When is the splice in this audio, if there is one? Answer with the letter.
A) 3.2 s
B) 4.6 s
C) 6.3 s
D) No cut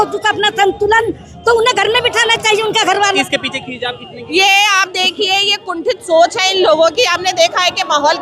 A